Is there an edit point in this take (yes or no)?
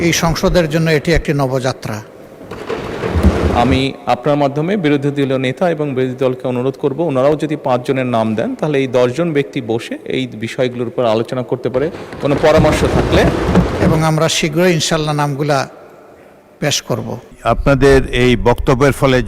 yes